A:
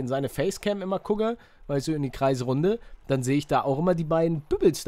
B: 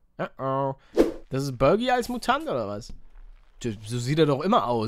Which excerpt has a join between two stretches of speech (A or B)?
B